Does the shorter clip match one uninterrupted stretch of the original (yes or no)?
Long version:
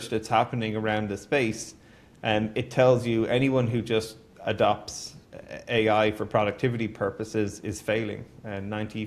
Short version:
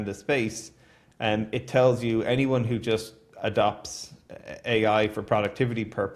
yes